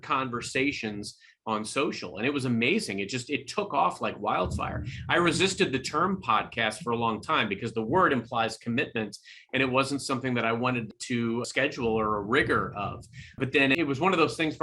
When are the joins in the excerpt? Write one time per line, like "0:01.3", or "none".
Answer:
0:11.2
0:13.4